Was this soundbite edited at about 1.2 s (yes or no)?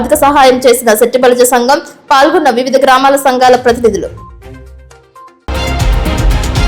no